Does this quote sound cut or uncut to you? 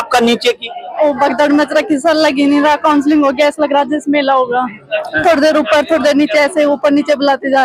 uncut